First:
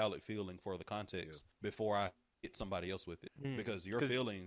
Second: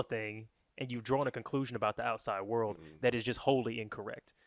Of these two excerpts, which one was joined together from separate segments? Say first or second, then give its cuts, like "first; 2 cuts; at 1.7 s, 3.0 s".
first; 2 cuts; at 1.4 s, 3.3 s